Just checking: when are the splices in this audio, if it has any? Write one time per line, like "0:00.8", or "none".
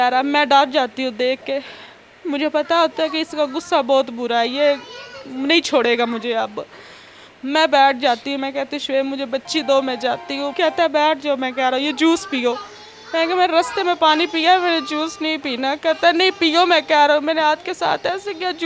0:10.5